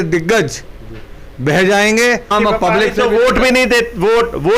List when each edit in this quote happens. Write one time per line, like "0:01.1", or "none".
0:02.3

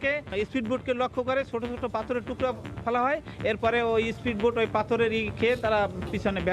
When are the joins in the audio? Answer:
none

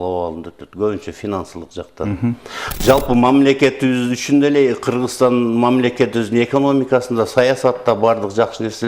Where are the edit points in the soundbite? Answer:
0:02.6

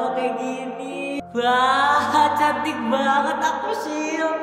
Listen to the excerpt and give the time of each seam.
0:01.2

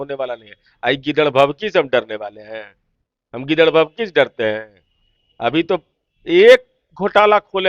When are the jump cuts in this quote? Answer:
none

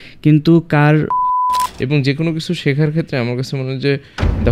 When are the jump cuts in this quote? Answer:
0:01.4

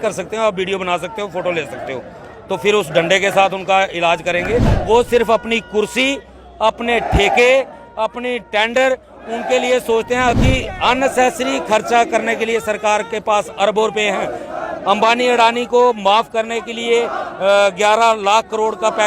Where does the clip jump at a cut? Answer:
0:04.7
0:10.3

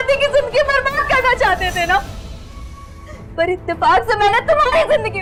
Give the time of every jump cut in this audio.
none

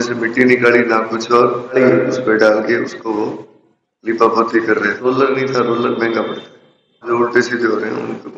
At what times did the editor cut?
0:01.8
0:05.1
0:07.1

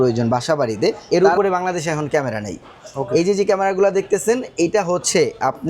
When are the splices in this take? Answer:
0:01.0

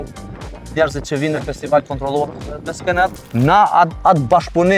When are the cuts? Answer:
0:03.2

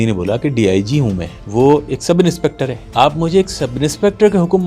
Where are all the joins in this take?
0:01.3
0:02.8

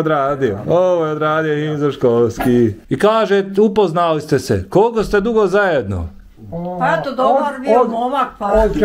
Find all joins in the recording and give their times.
0:02.8

